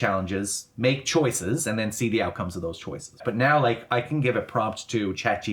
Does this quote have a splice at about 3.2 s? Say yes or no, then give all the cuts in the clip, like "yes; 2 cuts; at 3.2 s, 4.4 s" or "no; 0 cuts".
yes; 1 cut; at 3.2 s